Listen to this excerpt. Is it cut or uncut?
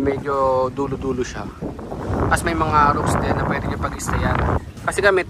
uncut